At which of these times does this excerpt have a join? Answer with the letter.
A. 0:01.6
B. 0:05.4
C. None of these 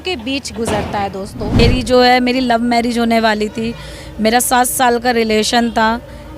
A